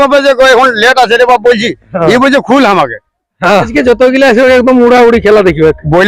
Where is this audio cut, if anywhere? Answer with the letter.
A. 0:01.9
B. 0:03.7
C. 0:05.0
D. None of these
B